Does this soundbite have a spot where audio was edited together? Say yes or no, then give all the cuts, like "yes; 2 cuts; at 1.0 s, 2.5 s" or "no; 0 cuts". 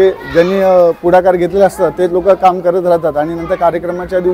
no; 0 cuts